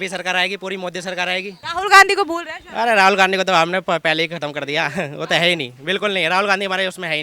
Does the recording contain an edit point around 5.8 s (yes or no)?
no